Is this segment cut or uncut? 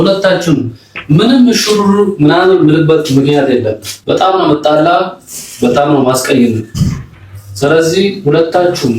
cut